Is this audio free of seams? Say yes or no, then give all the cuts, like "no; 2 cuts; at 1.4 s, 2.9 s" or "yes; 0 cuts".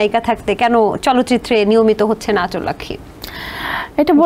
yes; 0 cuts